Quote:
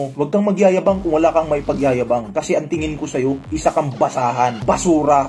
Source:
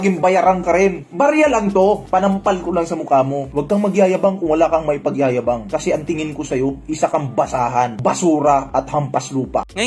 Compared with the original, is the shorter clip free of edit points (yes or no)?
yes